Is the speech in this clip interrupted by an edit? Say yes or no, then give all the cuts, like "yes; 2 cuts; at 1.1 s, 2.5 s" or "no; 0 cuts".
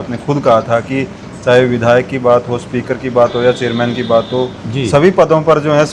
no; 0 cuts